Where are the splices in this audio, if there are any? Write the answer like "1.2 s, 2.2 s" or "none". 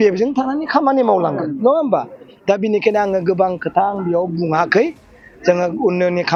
none